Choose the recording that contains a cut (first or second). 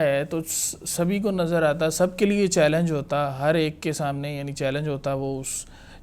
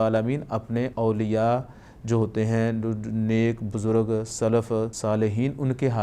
second